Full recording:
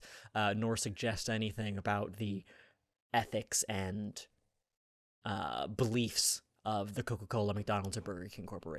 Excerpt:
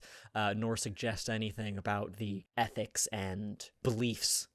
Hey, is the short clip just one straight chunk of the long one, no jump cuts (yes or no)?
no